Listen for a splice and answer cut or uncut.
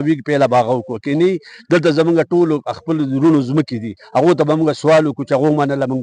uncut